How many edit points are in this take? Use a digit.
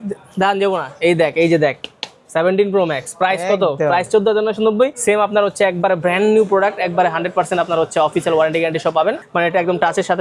2